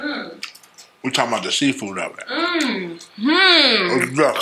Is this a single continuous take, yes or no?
yes